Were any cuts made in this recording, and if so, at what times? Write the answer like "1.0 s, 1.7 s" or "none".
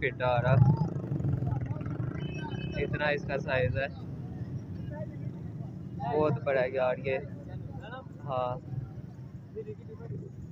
none

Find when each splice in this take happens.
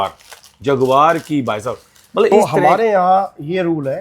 2.3 s

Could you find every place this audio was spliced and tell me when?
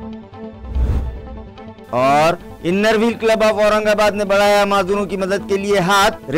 1.7 s

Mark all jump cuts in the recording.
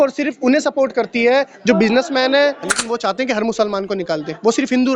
2.7 s

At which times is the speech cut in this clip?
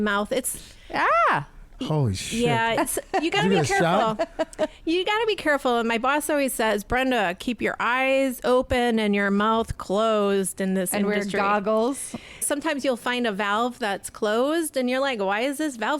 12.4 s

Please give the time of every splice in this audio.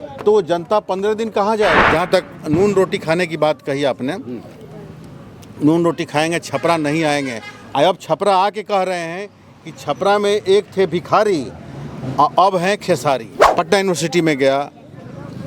1.8 s, 13.4 s

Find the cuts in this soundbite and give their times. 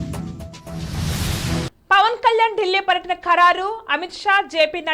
1.7 s

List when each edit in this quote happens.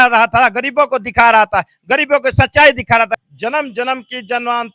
3.2 s

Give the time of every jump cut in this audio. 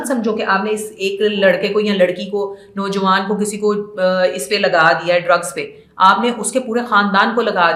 none

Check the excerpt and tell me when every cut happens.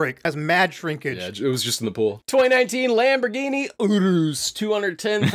1.2 s, 2.2 s

